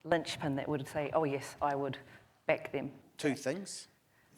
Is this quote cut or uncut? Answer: cut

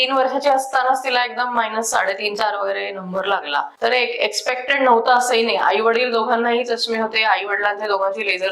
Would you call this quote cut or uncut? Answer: cut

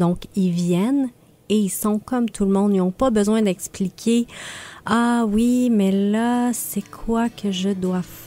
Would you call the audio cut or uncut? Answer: uncut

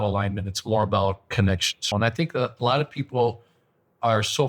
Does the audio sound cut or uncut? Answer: cut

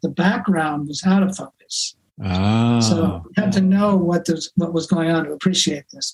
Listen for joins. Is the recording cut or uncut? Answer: uncut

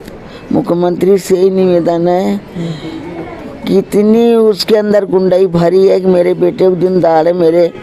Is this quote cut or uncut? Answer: uncut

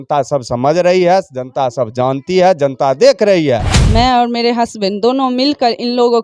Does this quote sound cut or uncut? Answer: cut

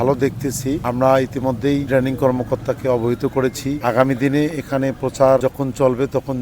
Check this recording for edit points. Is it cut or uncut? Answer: cut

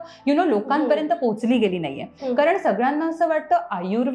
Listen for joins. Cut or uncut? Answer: cut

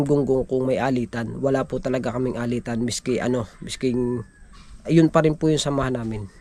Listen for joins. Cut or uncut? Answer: uncut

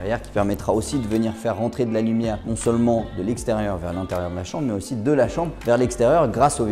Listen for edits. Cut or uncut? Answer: uncut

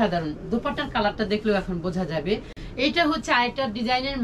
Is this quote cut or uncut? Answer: cut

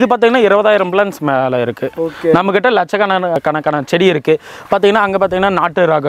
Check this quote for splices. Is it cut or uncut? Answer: uncut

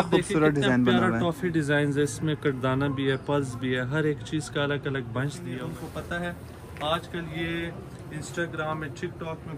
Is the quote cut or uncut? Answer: cut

